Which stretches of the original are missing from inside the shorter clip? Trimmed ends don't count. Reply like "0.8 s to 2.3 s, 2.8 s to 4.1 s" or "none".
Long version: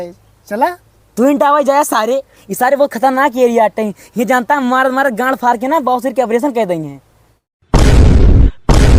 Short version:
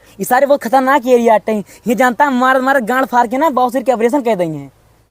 none